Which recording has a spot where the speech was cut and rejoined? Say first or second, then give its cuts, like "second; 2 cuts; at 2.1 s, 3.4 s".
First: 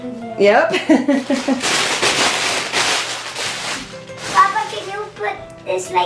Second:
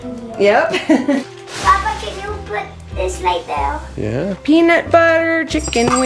second; 2 cuts; at 1.2 s, 4.3 s